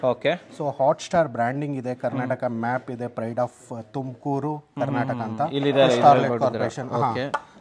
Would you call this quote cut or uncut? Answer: uncut